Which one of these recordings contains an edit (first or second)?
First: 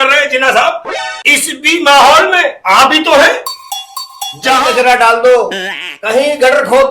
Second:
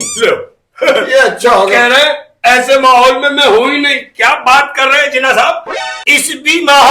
first